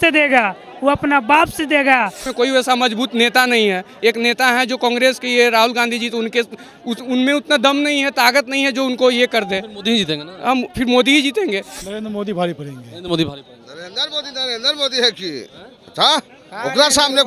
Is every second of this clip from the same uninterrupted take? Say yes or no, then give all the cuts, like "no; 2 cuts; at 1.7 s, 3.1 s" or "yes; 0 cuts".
no; 2 cuts; at 2.2 s, 11.8 s